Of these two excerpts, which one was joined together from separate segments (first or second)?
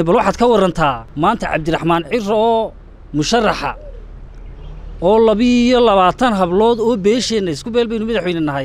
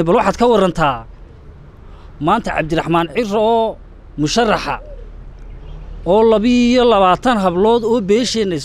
first